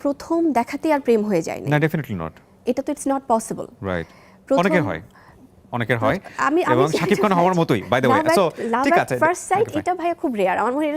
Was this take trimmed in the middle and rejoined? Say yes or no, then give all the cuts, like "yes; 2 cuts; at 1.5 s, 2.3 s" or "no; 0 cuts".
no; 0 cuts